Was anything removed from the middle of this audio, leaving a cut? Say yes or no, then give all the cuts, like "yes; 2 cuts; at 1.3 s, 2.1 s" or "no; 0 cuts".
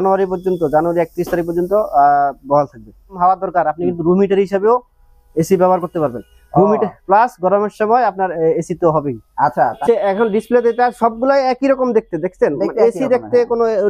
yes; 2 cuts; at 3.2 s, 9.8 s